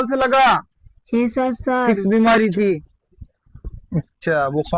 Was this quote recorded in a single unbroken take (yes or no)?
no